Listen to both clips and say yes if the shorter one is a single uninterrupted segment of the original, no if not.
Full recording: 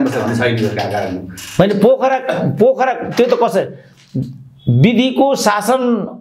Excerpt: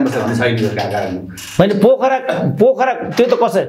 yes